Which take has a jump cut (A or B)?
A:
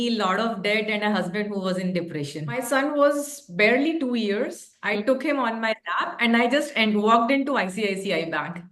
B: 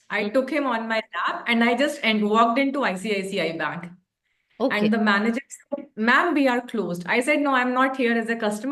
A